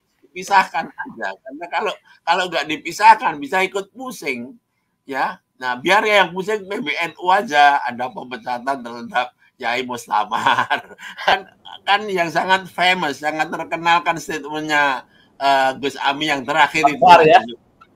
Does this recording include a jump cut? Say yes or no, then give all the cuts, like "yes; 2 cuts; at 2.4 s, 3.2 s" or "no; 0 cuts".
yes; 1 cut; at 11.3 s